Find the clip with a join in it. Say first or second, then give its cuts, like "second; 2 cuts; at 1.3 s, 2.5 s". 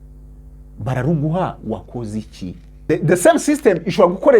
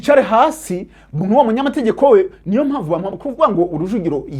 first; 1 cut; at 2.9 s